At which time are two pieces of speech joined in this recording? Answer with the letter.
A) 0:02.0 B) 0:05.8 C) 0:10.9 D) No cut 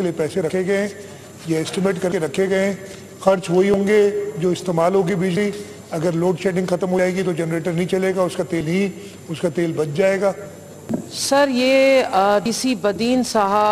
C